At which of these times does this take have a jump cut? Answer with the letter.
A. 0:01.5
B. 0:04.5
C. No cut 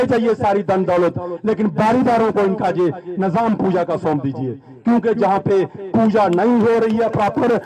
C